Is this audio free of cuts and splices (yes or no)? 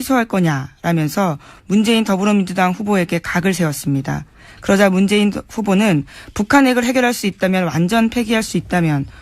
no